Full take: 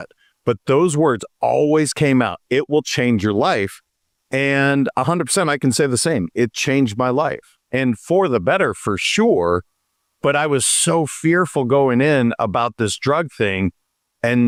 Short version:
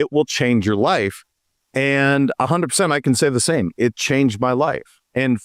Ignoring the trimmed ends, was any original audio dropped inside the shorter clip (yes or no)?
no